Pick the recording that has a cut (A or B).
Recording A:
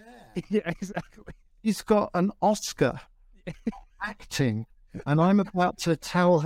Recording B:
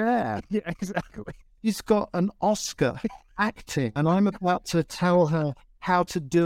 B